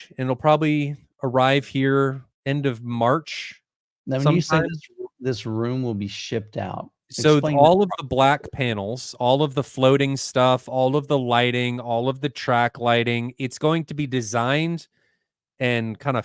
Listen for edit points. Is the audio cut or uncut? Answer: uncut